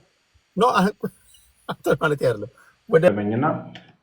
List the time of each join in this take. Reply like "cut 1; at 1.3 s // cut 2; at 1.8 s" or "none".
cut 1; at 3.1 s